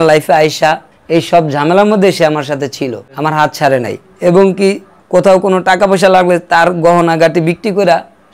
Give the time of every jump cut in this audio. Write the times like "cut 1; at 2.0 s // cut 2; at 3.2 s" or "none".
cut 1; at 1.0 s // cut 2; at 4.9 s